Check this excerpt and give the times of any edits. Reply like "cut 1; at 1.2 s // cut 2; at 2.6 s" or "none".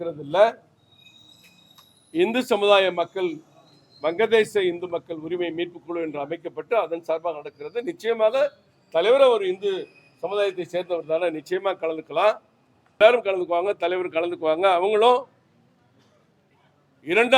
cut 1; at 13.0 s